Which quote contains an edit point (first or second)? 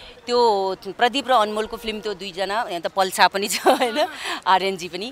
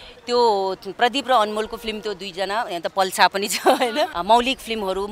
second